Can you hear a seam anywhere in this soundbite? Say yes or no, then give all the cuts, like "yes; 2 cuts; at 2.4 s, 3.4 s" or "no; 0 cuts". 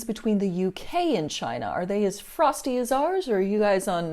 no; 0 cuts